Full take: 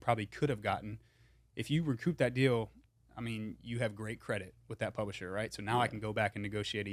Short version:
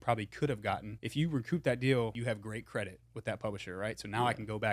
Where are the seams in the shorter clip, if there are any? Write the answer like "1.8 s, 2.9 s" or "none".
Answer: 1.0 s, 2.2 s